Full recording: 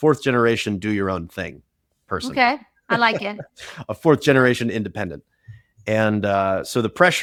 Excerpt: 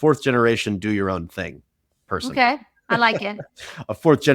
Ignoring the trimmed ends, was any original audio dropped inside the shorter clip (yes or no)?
no